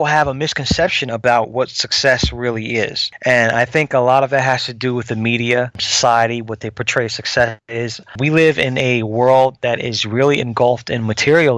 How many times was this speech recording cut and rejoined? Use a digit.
3